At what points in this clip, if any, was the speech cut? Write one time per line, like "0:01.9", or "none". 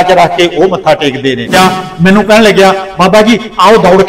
0:01.5